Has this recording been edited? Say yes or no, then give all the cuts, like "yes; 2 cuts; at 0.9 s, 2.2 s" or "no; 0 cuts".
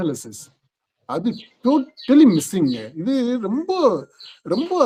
no; 0 cuts